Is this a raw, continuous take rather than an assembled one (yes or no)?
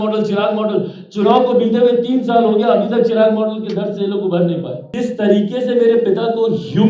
no